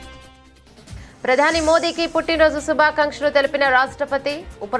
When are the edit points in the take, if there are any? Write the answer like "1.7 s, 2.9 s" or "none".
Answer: 1.1 s